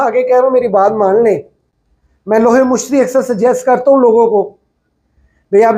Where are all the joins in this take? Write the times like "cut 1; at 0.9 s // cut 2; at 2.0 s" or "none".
none